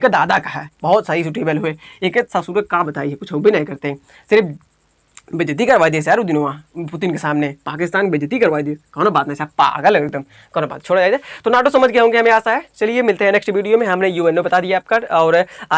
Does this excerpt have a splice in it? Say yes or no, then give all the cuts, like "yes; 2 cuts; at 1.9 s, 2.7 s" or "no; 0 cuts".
no; 0 cuts